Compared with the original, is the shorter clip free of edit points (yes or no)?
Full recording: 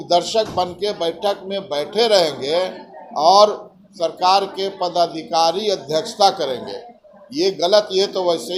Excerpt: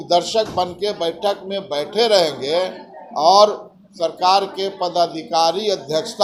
yes